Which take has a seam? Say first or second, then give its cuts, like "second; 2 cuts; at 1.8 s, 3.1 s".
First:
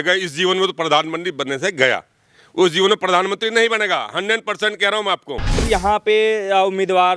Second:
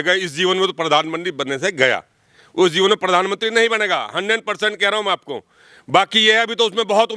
first; 1 cut; at 5.6 s